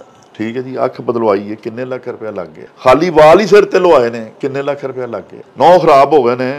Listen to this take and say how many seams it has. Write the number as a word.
two